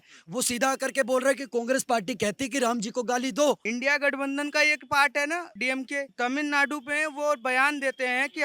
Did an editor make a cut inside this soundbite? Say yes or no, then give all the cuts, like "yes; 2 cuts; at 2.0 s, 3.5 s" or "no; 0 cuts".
yes; 2 cuts; at 3.6 s, 5.8 s